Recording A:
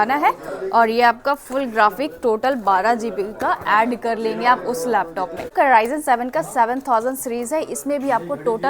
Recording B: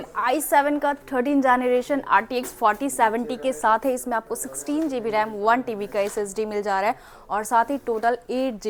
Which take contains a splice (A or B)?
A